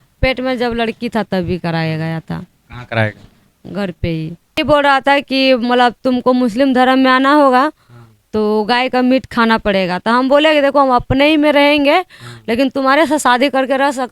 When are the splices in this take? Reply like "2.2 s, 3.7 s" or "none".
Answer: 4.6 s